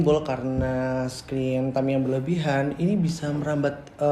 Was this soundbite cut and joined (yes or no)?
no